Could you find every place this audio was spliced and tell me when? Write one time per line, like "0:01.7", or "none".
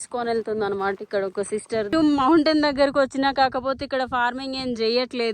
0:01.9